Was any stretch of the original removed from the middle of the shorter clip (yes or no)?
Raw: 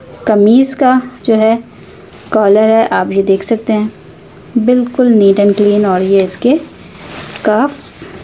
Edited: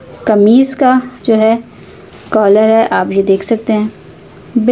no